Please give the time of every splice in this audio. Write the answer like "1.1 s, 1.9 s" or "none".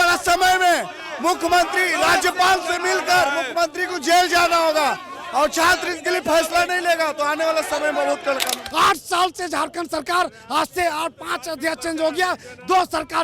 8.5 s